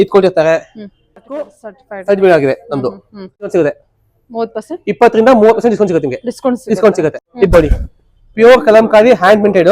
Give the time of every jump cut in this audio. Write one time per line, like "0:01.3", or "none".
0:01.5
0:03.5
0:07.2